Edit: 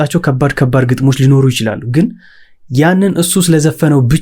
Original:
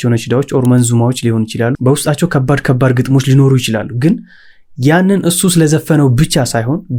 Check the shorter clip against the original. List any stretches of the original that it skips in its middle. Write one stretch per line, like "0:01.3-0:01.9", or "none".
none